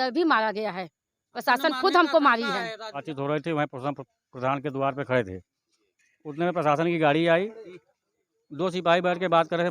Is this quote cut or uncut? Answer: cut